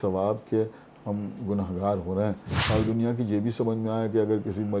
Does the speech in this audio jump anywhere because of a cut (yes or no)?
yes